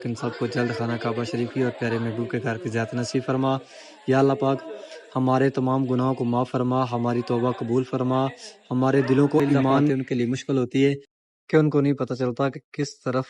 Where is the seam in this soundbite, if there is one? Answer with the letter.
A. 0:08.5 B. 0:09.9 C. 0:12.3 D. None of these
B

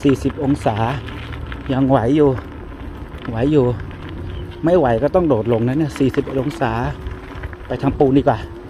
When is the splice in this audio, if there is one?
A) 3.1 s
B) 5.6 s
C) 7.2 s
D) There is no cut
D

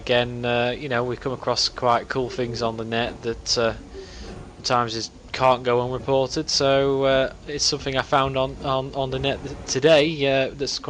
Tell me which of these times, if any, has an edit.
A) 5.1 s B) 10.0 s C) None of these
B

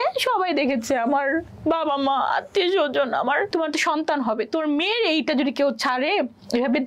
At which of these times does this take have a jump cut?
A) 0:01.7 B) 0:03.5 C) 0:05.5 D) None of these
B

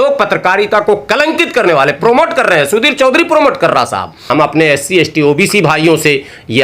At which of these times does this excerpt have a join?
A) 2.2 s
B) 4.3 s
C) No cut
B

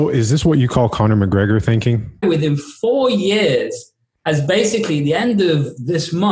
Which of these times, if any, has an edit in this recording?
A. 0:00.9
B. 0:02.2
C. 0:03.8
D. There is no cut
B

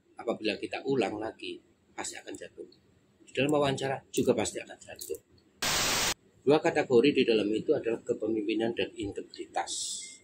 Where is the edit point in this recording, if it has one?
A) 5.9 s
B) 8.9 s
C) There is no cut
A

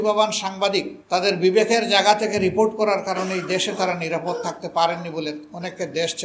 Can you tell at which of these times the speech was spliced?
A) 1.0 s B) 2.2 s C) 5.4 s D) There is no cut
A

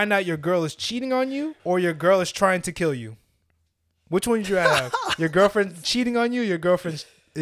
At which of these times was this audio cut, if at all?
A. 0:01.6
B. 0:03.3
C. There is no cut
A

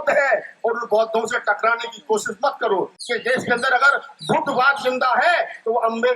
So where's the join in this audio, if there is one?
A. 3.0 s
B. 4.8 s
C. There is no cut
A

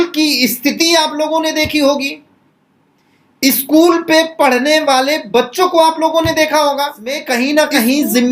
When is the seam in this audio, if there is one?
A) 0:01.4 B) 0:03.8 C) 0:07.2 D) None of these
C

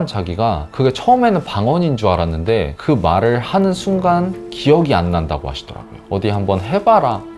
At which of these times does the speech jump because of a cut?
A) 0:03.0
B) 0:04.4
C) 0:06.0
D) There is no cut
C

